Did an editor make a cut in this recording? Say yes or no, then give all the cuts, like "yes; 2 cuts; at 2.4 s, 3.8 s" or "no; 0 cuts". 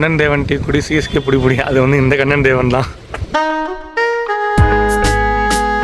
no; 0 cuts